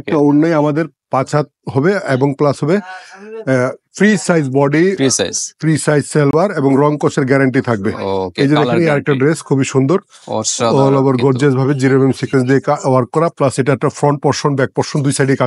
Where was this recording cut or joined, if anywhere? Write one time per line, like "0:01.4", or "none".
none